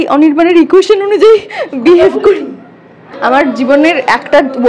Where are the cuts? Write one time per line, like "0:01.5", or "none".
0:03.1